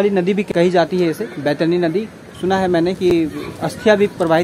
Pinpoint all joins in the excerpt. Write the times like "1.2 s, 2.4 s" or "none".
none